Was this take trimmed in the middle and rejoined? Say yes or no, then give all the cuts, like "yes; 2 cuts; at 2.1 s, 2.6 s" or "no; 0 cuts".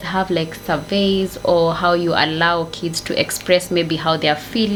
no; 0 cuts